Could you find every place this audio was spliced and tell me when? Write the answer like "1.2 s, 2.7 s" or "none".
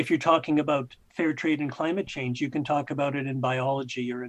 1.0 s